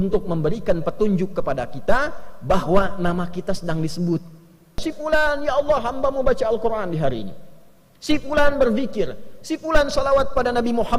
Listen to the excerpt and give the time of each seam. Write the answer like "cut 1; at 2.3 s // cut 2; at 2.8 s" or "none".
cut 1; at 4.8 s